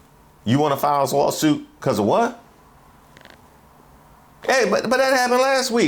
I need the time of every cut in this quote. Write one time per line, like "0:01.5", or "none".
none